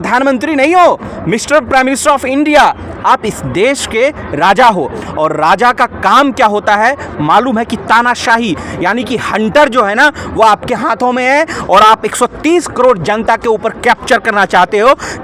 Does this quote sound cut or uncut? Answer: uncut